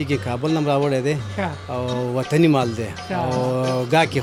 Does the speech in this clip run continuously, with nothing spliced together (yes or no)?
yes